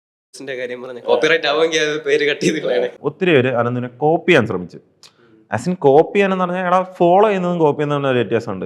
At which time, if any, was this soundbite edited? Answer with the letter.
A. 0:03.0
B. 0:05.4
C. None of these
A